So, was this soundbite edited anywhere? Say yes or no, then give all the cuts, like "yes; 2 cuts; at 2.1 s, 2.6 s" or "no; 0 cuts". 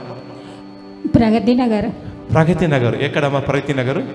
no; 0 cuts